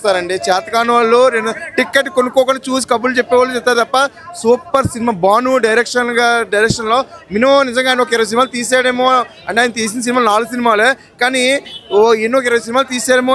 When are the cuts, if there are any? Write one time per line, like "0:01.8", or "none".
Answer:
none